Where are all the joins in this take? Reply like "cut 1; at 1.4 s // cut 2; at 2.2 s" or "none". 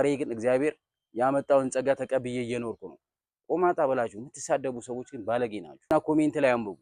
cut 1; at 5.9 s